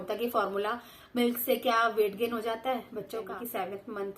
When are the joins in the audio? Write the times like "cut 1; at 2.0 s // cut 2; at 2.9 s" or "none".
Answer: cut 1; at 3.3 s